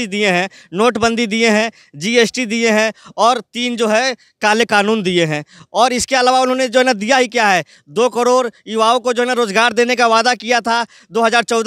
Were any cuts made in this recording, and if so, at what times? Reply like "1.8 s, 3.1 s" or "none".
none